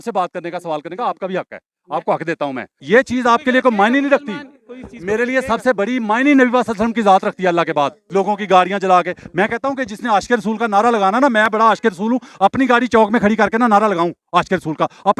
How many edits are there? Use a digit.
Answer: 2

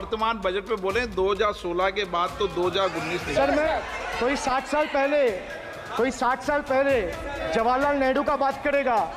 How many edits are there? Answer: 1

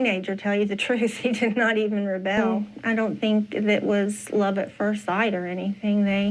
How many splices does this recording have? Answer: 1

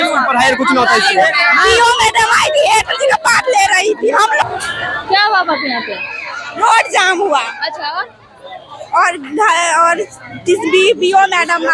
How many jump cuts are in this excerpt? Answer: 1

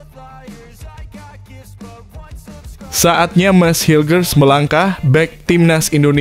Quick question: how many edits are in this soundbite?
1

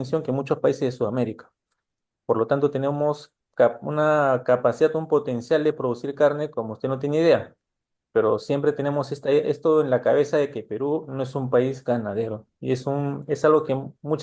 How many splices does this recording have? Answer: 0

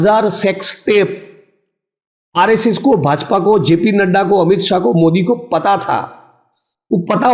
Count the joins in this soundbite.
0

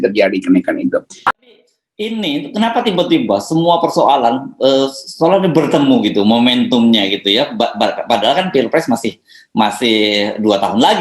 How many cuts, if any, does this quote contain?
1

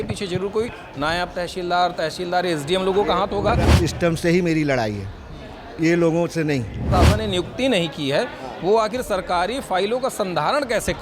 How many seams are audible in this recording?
2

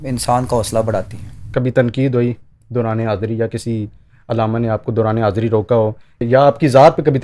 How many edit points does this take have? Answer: 2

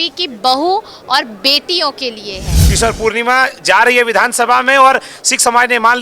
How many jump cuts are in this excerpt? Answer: 1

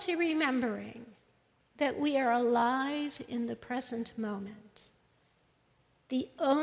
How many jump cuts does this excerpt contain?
0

